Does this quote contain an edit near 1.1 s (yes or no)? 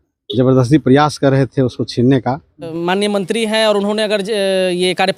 no